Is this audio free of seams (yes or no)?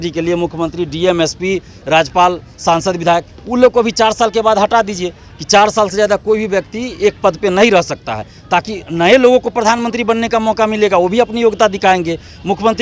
yes